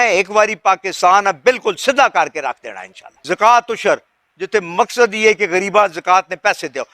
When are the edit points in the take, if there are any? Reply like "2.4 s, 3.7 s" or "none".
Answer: 3.2 s

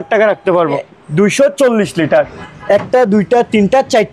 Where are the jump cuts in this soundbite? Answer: 0.9 s, 2.5 s

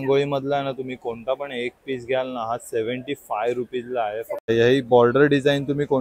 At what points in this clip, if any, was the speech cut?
4.5 s

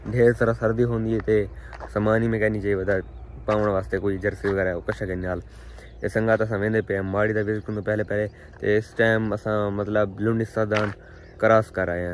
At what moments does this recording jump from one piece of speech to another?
none

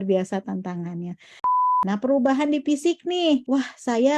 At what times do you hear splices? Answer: 1.6 s, 3.4 s

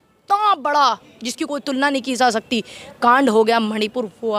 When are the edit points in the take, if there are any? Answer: none

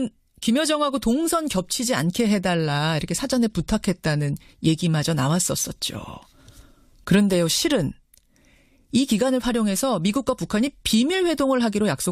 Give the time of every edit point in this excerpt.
4.8 s

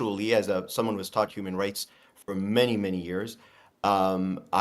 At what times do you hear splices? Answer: none

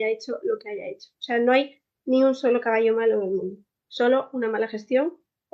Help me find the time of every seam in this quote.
none

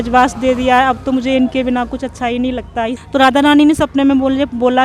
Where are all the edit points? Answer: 3.0 s

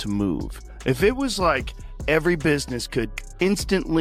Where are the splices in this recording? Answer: none

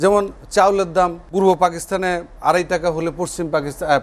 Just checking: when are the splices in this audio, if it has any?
1.2 s, 2.3 s

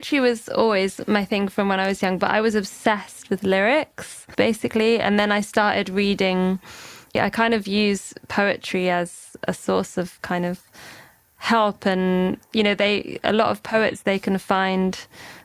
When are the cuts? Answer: 4.2 s, 7.2 s, 9.3 s

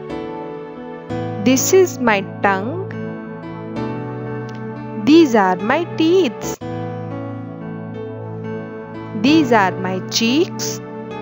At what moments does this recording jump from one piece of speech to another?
1.4 s, 2.8 s, 5.0 s, 6.5 s, 8.9 s, 10.5 s

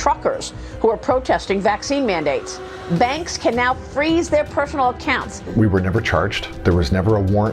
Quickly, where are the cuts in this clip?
5.4 s, 6.4 s

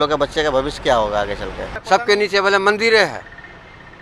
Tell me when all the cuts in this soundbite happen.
1.7 s

